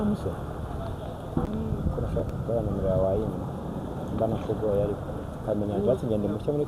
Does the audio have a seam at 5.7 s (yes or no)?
no